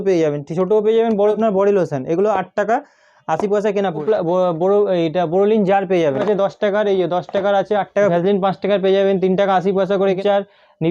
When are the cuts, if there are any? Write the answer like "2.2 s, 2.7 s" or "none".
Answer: 1.4 s, 4.0 s, 6.2 s, 8.1 s, 10.2 s

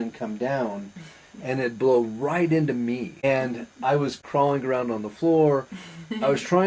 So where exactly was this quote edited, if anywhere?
3.1 s, 4.2 s

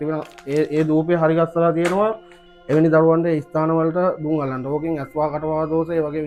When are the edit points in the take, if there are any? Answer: none

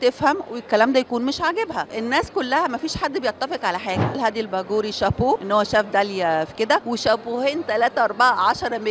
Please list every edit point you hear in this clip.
1.9 s, 4.2 s, 5.4 s, 6.8 s

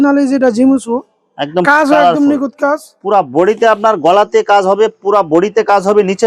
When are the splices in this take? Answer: none

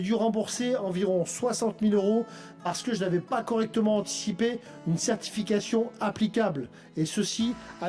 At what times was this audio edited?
none

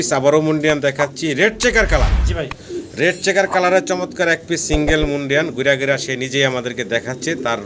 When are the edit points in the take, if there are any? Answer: none

